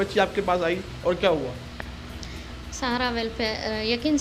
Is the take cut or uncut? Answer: uncut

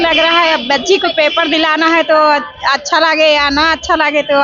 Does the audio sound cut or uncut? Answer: uncut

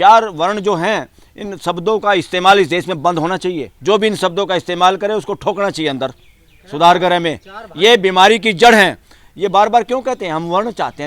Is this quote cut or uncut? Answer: cut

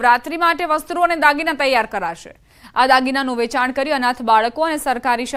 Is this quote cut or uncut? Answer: uncut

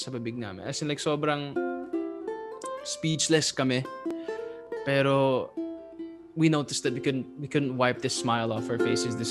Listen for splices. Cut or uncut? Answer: uncut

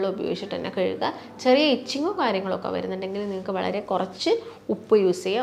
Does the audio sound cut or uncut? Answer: uncut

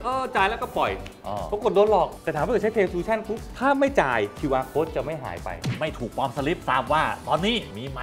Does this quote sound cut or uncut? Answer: cut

